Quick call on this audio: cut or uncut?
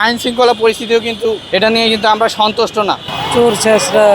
cut